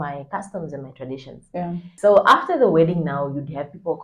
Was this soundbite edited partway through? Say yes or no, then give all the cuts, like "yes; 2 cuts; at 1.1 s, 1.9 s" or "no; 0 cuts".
yes; 1 cut; at 1.9 s